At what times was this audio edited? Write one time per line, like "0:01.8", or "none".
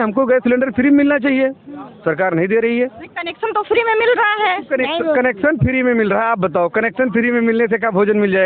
none